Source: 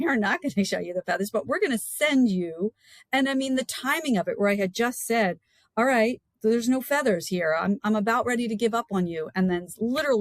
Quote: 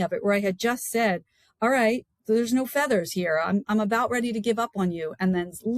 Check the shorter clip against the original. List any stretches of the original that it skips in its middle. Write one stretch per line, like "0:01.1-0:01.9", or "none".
none

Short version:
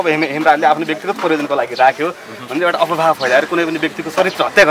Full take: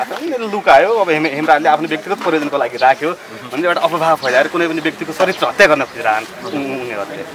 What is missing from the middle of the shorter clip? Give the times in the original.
none

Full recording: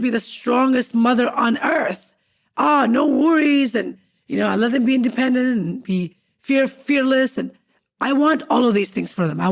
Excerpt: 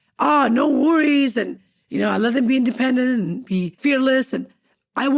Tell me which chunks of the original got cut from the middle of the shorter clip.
0:06.1-0:06.8

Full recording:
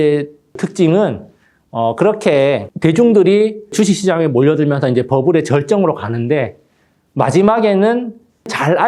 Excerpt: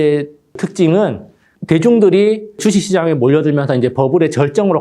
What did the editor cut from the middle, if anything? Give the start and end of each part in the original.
0:01.5-0:02.7

